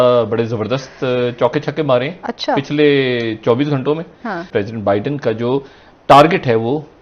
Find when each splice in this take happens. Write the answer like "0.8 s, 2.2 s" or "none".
4.5 s